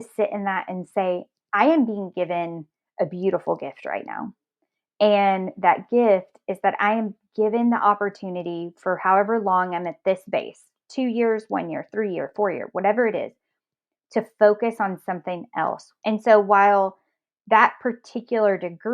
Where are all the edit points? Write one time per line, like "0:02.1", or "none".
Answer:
0:15.9